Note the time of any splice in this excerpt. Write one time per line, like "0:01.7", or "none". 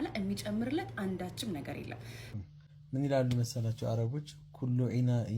0:02.3

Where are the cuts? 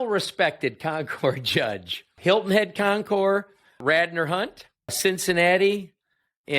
0:02.2
0:03.8
0:05.0

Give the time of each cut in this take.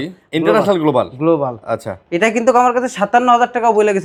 none

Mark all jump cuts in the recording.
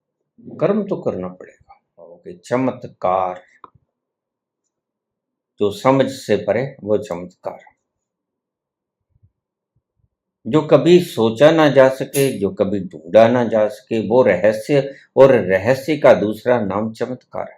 0:02.3

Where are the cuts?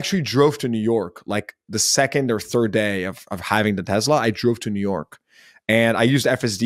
none

